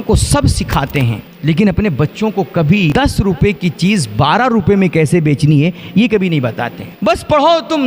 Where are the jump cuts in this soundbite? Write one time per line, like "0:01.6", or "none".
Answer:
0:01.3
0:02.9
0:06.9